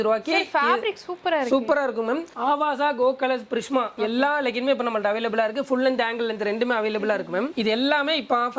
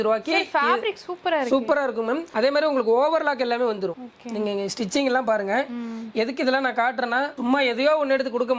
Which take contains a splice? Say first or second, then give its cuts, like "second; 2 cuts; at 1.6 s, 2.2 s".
first; 2 cuts; at 2.3 s, 7.5 s